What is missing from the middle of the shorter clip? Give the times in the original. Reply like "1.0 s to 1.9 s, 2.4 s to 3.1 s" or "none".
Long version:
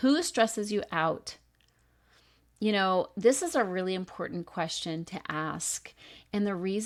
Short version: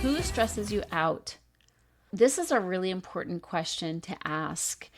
2.1 s to 3.1 s

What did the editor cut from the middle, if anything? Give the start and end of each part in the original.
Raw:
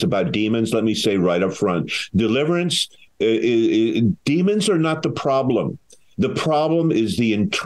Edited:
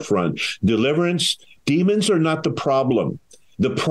3.1 s to 4.2 s

